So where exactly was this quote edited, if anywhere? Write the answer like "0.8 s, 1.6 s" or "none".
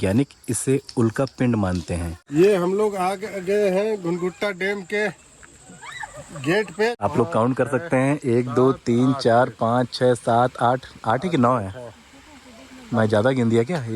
2.1 s, 7.0 s